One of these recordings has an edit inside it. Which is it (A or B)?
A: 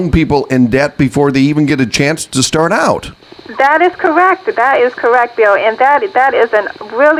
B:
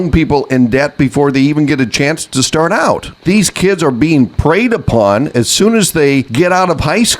B